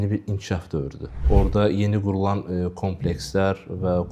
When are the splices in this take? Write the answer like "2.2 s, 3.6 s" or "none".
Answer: 1.2 s